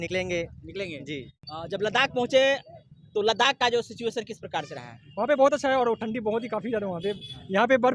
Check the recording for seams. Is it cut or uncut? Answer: cut